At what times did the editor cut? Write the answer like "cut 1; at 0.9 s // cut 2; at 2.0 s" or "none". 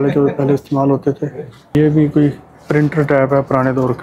cut 1; at 1.7 s